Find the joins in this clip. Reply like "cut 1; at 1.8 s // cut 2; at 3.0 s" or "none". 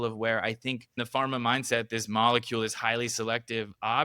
cut 1; at 1.0 s